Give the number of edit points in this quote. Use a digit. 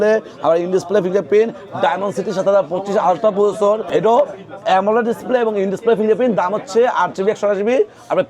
1